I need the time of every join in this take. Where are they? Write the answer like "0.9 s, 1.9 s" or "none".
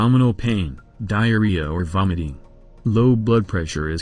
1.1 s